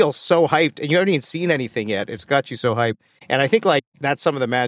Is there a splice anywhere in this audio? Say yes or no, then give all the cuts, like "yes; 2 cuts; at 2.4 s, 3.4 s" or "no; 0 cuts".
no; 0 cuts